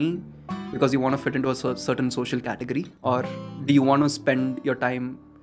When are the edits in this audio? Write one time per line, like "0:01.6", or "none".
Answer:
0:02.9